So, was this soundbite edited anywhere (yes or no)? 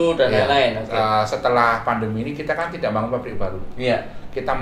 no